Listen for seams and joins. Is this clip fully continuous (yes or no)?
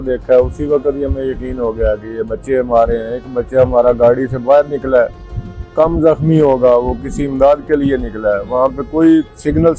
yes